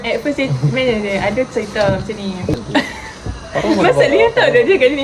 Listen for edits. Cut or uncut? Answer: cut